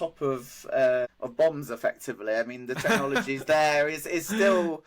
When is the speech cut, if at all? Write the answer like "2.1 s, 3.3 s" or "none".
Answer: 1.2 s